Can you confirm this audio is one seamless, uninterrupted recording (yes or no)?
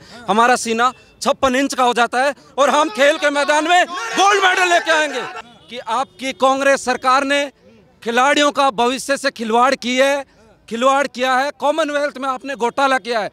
no